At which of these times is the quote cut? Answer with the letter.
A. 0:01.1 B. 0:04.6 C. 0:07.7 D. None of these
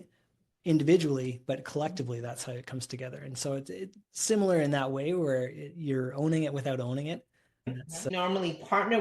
C